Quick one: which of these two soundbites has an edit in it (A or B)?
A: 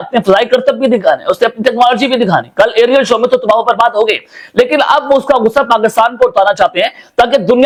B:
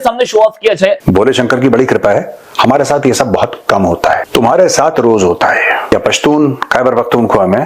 B